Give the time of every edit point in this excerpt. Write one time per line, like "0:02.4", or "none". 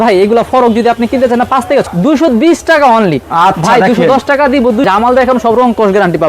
0:01.9
0:04.9